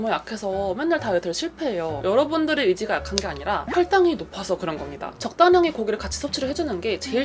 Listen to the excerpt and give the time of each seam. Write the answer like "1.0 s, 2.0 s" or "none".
2.0 s, 3.6 s, 5.3 s